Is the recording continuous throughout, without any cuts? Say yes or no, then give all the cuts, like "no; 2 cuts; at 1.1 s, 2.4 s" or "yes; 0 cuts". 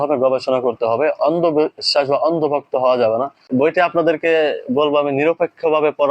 no; 1 cut; at 3.4 s